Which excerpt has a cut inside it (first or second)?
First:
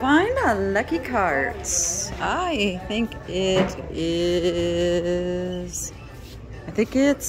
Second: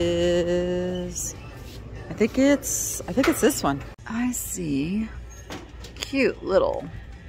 second